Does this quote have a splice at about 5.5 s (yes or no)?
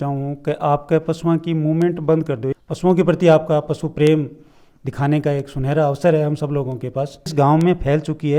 no